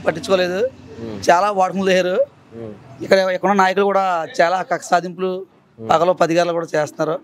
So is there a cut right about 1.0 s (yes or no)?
no